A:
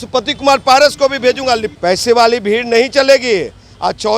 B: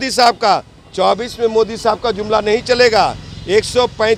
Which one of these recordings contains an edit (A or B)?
A